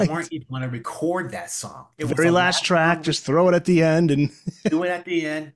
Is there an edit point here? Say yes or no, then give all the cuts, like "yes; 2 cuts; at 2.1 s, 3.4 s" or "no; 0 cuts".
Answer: no; 0 cuts